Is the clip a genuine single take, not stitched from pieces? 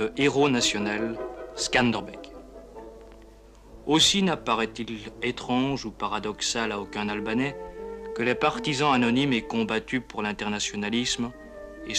yes; 0 cuts

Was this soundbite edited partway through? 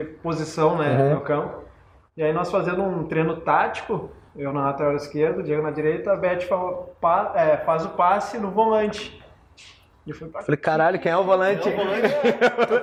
no; 0 cuts

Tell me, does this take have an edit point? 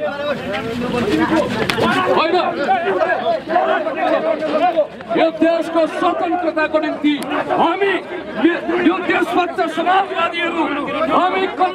no; 0 cuts

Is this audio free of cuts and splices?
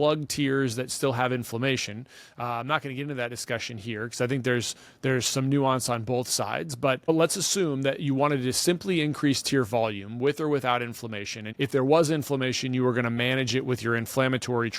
no; 2 cuts; at 7.1 s, 11.4 s

